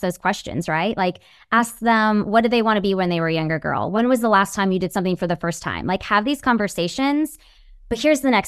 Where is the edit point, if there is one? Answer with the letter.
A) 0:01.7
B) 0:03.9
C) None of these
B